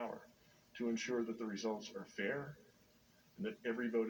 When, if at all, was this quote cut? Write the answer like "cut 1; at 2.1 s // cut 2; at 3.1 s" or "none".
none

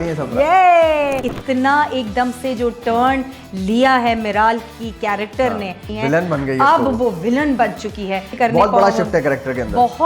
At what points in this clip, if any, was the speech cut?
cut 1; at 1.2 s // cut 2; at 5.9 s // cut 3; at 8.3 s

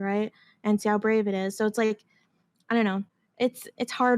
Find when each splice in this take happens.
cut 1; at 3.1 s

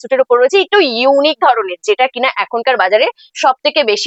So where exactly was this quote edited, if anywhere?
none

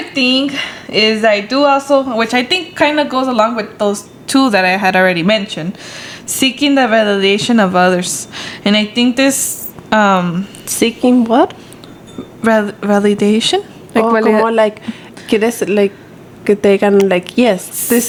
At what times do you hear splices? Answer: none

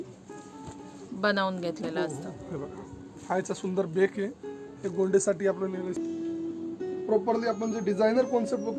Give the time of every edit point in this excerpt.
cut 1; at 6.0 s

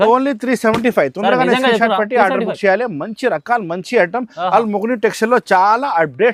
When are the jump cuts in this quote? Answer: none

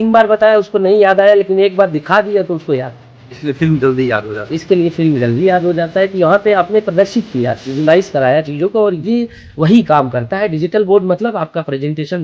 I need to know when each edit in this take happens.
none

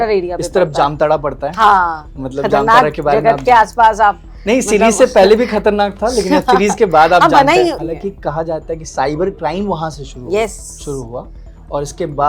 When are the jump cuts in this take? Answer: cut 1; at 7.8 s

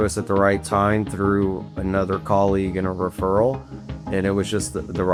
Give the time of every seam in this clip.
none

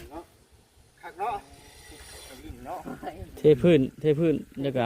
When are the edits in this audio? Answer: cut 1; at 2.4 s

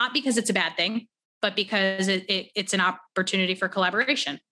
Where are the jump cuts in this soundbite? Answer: none

